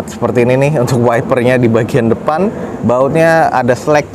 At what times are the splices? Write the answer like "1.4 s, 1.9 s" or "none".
none

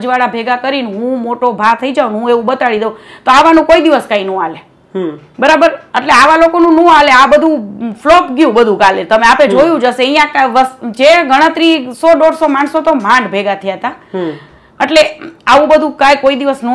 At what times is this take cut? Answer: none

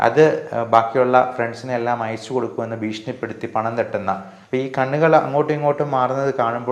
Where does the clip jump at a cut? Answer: 4.3 s

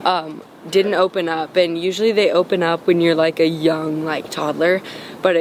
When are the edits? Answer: none

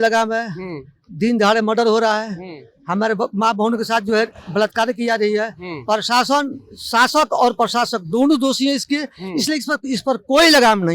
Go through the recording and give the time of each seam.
none

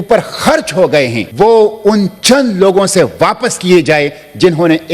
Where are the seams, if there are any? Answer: 1.2 s

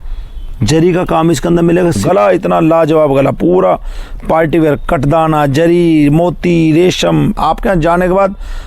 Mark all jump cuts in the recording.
2.0 s, 7.4 s

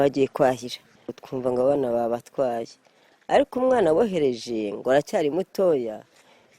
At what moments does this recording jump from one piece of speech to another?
1.2 s

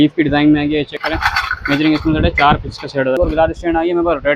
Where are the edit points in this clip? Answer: 0.9 s, 3.2 s

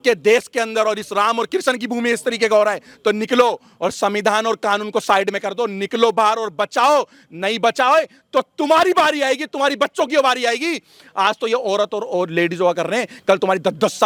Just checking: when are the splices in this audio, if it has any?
none

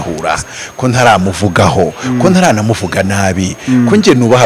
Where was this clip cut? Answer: none

